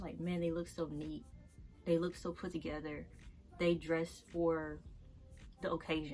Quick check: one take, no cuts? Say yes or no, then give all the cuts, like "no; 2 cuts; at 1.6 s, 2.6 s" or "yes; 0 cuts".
yes; 0 cuts